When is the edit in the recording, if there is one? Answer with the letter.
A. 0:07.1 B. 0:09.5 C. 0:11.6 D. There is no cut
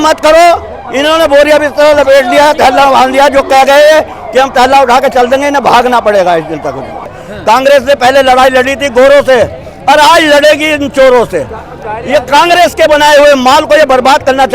A